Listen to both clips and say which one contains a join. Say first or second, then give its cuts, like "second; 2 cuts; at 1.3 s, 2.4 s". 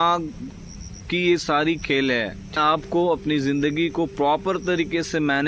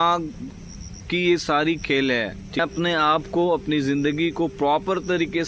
first; 1 cut; at 2.5 s